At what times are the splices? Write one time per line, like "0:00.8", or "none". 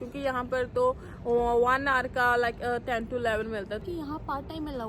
0:03.8